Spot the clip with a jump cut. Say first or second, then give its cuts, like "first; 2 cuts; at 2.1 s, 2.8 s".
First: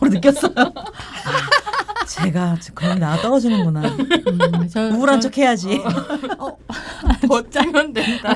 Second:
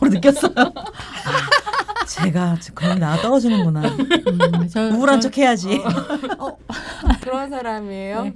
second; 1 cut; at 7.2 s